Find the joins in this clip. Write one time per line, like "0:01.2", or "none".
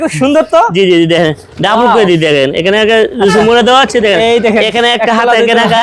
none